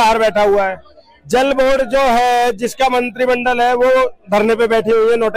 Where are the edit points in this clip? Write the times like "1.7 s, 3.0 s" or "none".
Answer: none